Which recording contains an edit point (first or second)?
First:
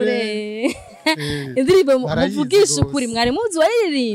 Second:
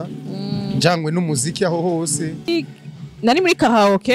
second